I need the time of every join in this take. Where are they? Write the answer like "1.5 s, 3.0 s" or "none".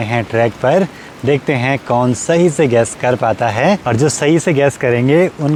none